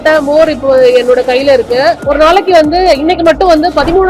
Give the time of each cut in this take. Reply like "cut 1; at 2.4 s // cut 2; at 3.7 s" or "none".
cut 1; at 2.0 s

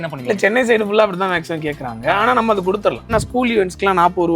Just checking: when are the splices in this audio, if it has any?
cut 1; at 3.1 s

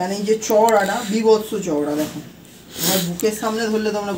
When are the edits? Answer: none

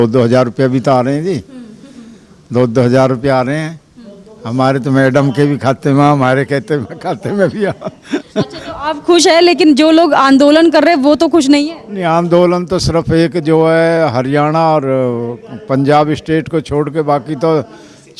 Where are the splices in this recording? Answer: none

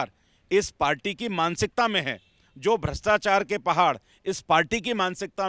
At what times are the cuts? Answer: none

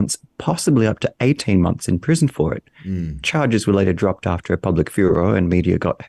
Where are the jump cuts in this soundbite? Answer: none

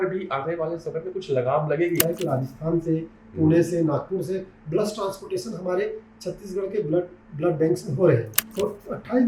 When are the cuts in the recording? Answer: cut 1; at 2.0 s // cut 2; at 8.4 s

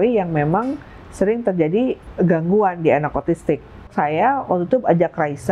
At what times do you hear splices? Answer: cut 1; at 2.0 s // cut 2; at 3.9 s

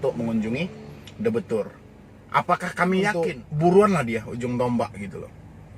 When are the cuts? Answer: cut 1; at 3.1 s

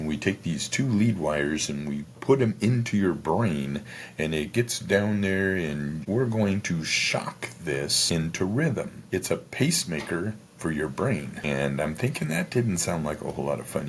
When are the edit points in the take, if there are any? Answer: cut 1; at 2.1 s // cut 2; at 6.0 s // cut 3; at 8.0 s // cut 4; at 9.0 s // cut 5; at 11.4 s

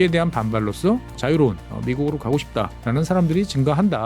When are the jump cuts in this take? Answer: cut 1; at 1.1 s // cut 2; at 2.8 s

